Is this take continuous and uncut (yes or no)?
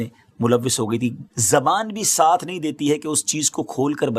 no